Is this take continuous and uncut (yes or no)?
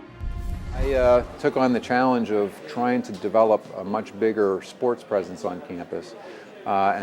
no